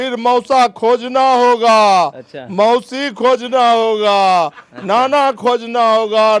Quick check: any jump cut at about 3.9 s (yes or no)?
no